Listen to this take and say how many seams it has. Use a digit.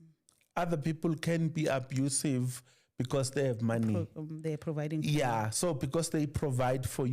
0